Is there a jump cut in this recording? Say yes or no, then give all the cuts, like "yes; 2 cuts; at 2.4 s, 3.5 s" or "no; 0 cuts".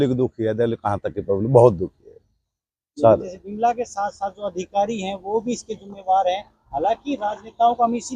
no; 0 cuts